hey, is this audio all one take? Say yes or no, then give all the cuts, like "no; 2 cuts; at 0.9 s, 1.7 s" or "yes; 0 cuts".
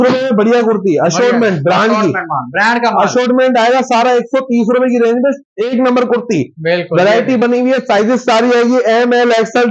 yes; 0 cuts